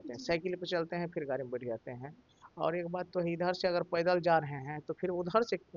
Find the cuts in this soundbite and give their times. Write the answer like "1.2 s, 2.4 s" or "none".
none